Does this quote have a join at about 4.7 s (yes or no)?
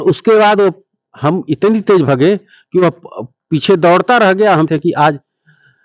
yes